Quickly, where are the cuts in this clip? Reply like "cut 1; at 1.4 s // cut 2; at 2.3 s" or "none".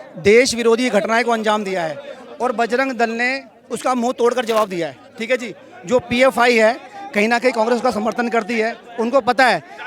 none